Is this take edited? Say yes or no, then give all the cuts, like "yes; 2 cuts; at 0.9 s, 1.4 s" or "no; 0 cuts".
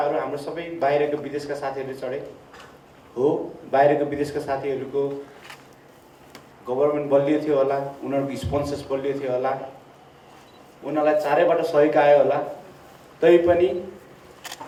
no; 0 cuts